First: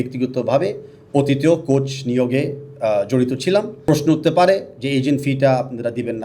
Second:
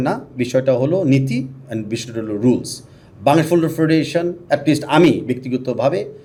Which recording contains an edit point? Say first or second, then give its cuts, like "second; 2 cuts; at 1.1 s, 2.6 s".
first; 1 cut; at 3.7 s